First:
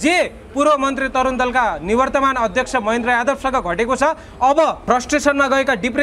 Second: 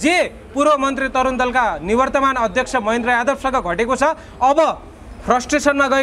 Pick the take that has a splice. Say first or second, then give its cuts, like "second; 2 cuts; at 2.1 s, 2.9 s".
first; 1 cut; at 4.8 s